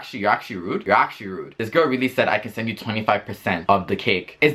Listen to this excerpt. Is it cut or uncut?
uncut